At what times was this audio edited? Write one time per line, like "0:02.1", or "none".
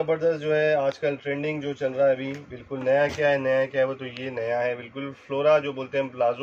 none